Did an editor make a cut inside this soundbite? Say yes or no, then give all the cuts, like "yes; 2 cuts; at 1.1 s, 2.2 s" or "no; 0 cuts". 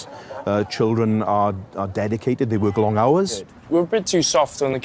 yes; 1 cut; at 3.5 s